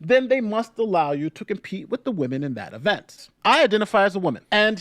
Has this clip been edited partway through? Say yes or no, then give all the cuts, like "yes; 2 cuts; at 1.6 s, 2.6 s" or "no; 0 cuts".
yes; 1 cut; at 3.2 s